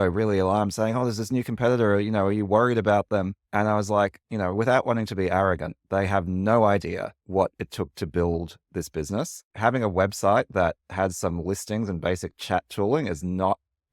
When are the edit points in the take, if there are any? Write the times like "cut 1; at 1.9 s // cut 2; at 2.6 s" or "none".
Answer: cut 1; at 9.4 s